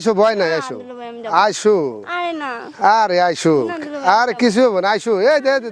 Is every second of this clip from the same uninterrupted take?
yes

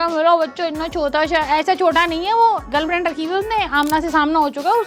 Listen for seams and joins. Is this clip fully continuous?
yes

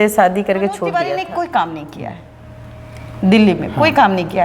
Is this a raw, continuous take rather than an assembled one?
no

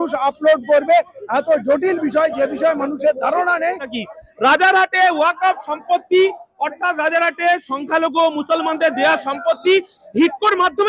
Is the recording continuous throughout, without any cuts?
no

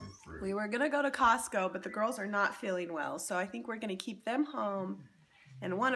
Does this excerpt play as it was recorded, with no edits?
yes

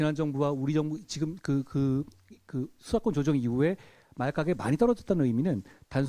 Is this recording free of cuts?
yes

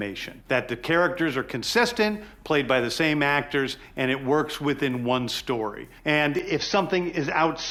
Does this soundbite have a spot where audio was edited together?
no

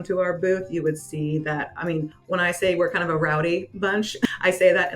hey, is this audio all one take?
no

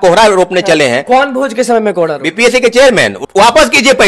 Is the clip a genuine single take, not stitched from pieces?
no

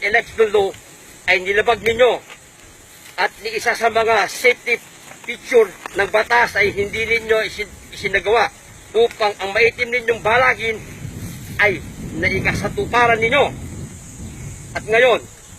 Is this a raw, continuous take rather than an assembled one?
no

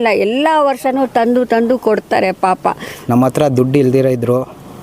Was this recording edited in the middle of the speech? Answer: yes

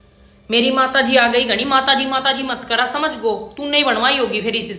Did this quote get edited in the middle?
no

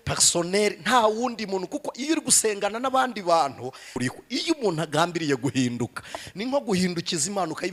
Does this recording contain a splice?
yes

